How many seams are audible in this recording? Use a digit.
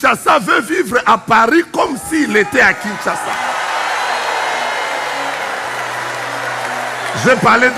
0